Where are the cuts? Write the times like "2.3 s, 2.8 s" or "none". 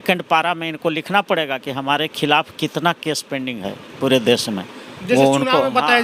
none